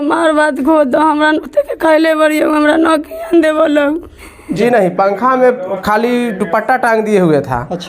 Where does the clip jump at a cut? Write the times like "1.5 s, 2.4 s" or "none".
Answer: 4.6 s